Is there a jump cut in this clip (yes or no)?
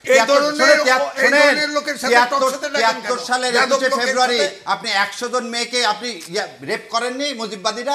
no